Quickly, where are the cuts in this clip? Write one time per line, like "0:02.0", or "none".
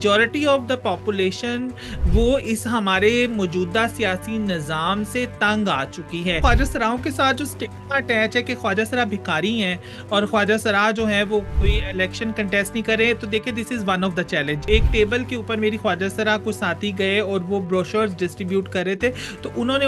0:06.4
0:11.5
0:14.6